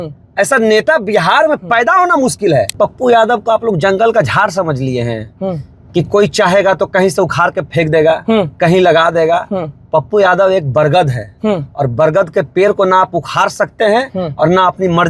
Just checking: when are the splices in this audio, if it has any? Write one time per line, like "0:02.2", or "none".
0:02.7